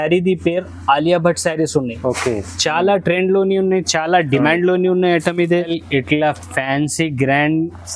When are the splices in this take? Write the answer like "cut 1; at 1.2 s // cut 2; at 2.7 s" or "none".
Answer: cut 1; at 5.8 s

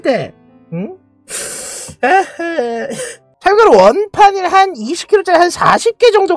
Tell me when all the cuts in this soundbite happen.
cut 1; at 3.2 s

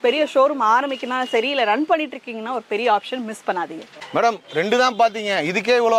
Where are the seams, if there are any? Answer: none

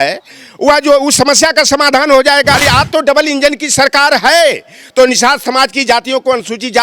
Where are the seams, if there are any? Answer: cut 1; at 2.6 s

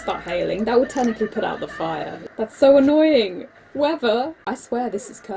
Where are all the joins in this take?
cut 1; at 2.2 s // cut 2; at 4.4 s

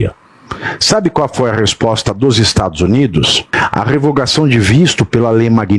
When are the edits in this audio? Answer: cut 1; at 3.4 s

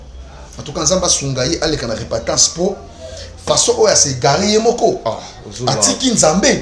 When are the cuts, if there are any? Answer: none

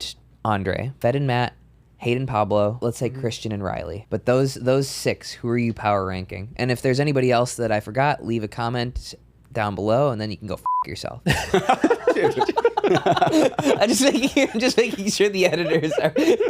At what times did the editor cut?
cut 1; at 0.9 s // cut 2; at 2.8 s // cut 3; at 4.0 s

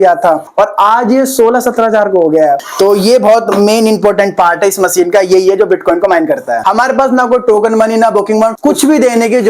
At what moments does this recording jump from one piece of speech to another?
cut 1; at 2.7 s // cut 2; at 6.6 s // cut 3; at 8.6 s

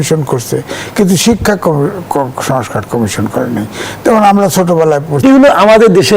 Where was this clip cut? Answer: cut 1; at 5.2 s

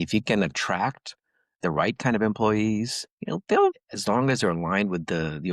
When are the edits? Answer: cut 1; at 3.8 s

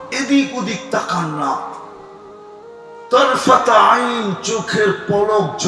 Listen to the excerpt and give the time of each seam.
cut 1; at 1.8 s // cut 2; at 3.1 s

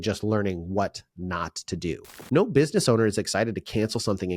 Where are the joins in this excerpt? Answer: cut 1; at 2.1 s

